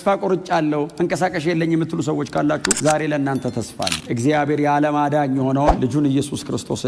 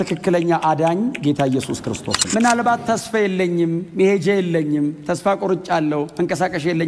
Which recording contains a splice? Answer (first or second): second